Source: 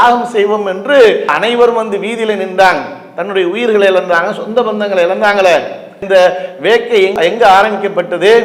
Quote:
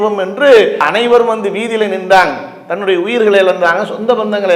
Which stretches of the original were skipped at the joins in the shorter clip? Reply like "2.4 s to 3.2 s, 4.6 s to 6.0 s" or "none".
none